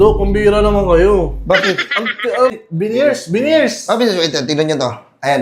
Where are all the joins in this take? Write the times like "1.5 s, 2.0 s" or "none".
2.6 s